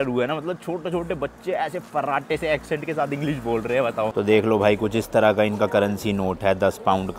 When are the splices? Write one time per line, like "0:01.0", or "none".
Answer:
0:04.1